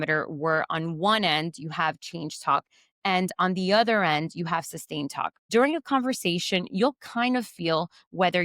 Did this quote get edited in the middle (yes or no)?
yes